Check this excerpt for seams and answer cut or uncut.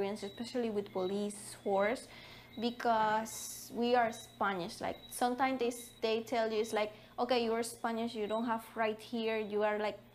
uncut